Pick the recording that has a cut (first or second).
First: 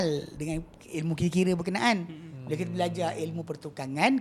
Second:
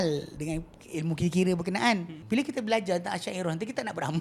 second